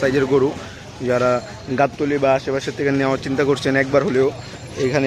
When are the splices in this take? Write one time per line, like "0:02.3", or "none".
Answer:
none